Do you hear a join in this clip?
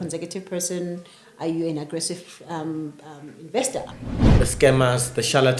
yes; 1 cut; at 4.3 s

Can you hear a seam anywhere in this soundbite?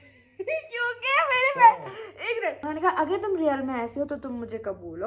yes; 1 cut; at 2.6 s

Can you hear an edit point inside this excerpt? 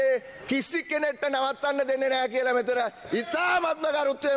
no; 0 cuts

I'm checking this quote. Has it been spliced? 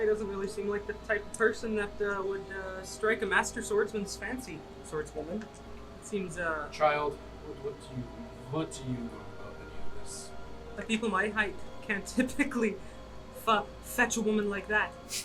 yes; 1 cut; at 5.7 s

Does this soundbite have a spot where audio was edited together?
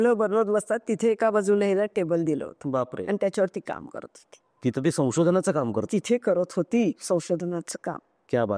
no; 0 cuts

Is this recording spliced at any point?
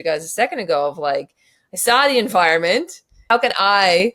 yes; 1 cut; at 3.2 s

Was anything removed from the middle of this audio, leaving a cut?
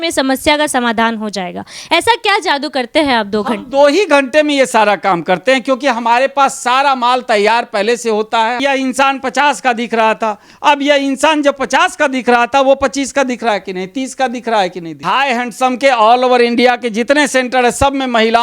yes; 2 cuts; at 8.6 s, 15.1 s

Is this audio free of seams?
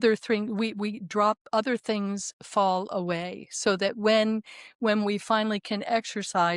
yes; 0 cuts

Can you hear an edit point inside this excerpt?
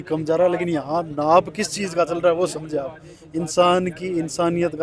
no; 0 cuts

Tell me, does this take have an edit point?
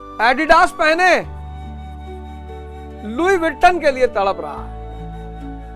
yes; 3 cuts; at 1.2 s, 3.0 s, 4.9 s

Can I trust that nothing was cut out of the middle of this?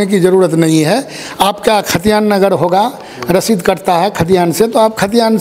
yes; 0 cuts

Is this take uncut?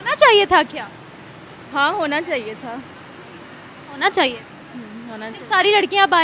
yes; 0 cuts

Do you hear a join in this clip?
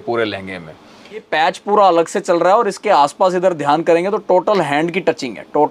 yes; 1 cut; at 1.3 s

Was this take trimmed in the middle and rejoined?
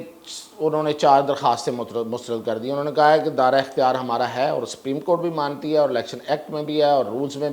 no; 0 cuts

